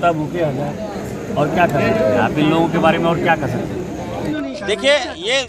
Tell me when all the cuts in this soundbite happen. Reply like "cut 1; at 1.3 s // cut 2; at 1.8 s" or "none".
cut 1; at 4.3 s